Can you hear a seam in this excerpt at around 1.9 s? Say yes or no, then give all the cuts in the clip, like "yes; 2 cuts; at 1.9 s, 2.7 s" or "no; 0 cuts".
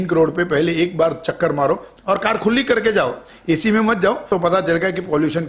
yes; 2 cuts; at 1.9 s, 4.3 s